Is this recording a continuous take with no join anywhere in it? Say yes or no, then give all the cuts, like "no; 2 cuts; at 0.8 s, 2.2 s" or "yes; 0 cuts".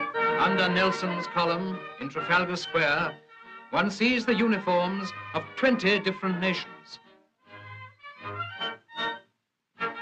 yes; 0 cuts